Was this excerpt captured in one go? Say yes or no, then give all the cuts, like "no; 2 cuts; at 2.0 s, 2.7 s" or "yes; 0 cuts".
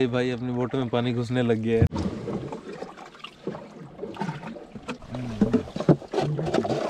yes; 0 cuts